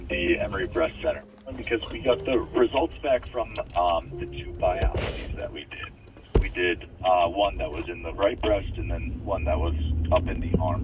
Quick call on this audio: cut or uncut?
cut